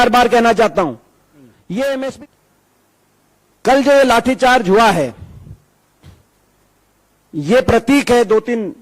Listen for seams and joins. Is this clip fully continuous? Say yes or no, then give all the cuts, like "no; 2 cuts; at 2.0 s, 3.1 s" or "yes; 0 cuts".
no; 1 cut; at 2.2 s